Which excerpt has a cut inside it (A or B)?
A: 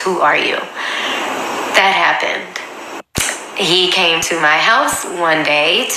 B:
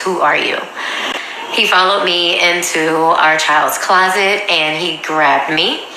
B